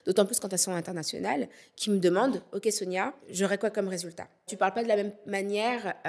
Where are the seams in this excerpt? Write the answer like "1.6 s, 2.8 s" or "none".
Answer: 3.2 s, 4.5 s